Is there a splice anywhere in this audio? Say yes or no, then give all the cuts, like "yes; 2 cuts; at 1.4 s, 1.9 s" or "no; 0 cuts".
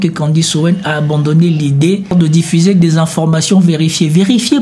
yes; 1 cut; at 2.1 s